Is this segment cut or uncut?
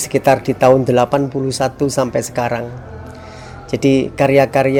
uncut